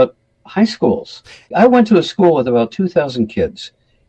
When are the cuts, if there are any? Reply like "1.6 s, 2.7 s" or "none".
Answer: 1.5 s